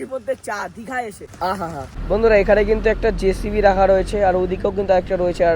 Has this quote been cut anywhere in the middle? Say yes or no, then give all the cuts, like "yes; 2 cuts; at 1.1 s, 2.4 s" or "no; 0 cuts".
yes; 2 cuts; at 1.2 s, 1.9 s